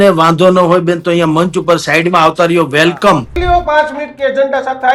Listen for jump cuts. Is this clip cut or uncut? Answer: cut